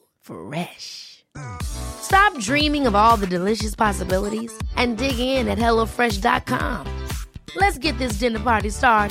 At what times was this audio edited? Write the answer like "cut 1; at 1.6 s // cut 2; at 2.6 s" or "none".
none